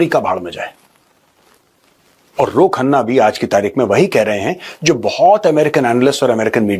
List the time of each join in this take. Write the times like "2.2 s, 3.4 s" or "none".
none